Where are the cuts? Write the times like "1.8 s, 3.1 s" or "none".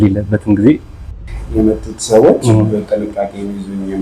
1.1 s